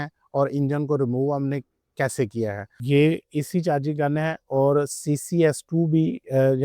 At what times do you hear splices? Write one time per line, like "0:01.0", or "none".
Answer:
0:02.7